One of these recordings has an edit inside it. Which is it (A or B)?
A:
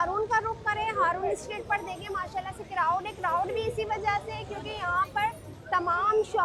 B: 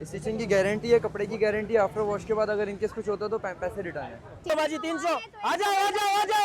B